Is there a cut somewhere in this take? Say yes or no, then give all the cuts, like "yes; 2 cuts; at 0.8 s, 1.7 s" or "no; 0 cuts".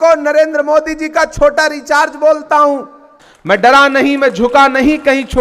yes; 1 cut; at 3.4 s